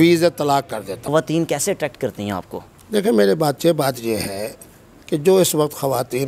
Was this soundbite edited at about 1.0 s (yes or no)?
yes